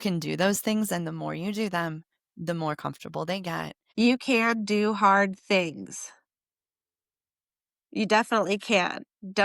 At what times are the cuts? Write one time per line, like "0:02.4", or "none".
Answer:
0:03.8